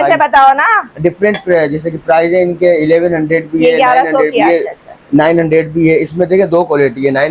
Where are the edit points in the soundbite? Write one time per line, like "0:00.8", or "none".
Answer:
none